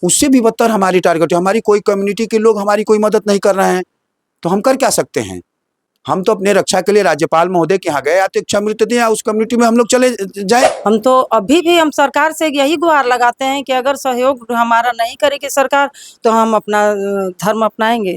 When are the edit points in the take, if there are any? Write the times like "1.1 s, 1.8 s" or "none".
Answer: 10.6 s